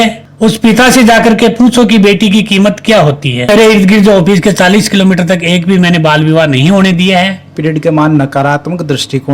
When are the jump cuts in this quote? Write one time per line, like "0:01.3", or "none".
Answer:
0:03.5
0:07.5